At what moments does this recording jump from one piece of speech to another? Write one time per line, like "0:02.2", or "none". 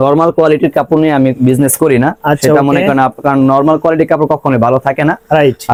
none

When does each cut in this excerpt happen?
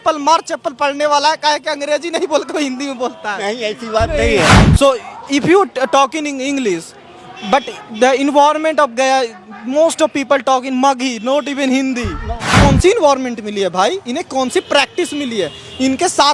0:04.6
0:12.6

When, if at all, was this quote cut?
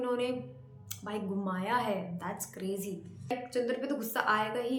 0:03.3

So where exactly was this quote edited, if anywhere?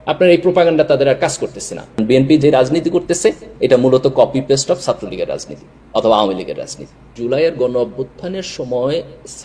0:02.0
0:07.1

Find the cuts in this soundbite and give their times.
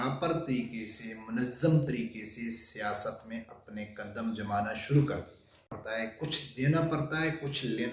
0:05.8

